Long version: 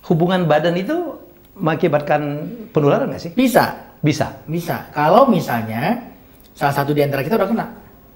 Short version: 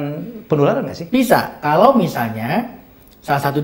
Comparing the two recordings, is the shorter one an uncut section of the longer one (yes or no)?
no